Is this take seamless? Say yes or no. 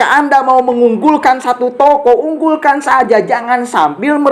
yes